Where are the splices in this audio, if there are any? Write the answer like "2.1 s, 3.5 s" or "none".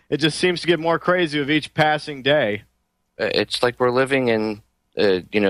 none